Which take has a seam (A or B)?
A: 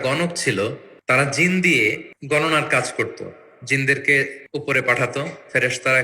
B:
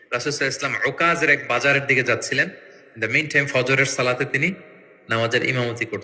A